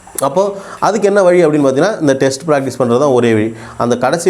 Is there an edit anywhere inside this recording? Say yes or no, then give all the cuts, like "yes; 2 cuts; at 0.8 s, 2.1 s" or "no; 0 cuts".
no; 0 cuts